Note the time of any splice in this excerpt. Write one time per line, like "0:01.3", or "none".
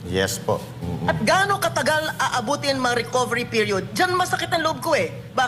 none